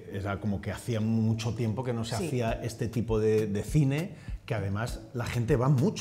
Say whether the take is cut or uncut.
uncut